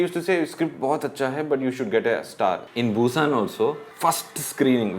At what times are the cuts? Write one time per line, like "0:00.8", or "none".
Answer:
0:02.7
0:03.9